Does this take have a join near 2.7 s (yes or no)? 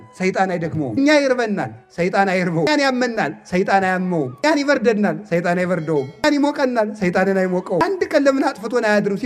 yes